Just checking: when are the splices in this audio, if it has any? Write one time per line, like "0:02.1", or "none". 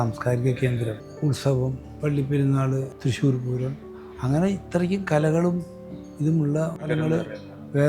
0:01.0
0:01.9
0:02.9
0:06.9